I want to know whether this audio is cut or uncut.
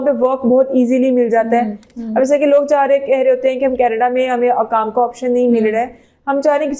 cut